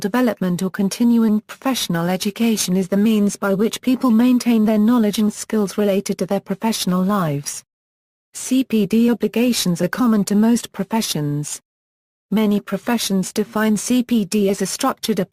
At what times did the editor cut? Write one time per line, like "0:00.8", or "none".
none

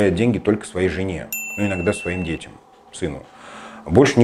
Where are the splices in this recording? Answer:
none

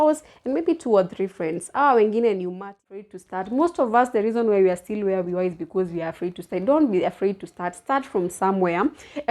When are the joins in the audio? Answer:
0:03.1

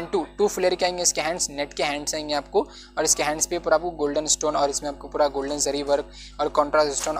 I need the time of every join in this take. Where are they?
none

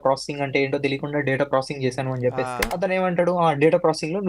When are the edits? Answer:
0:02.7

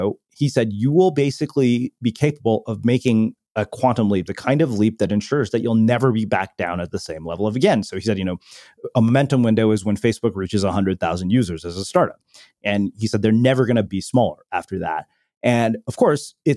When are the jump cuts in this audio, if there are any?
0:13.9

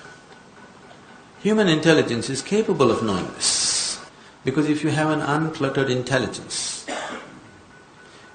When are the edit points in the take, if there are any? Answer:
none

